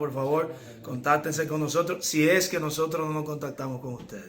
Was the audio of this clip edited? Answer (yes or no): no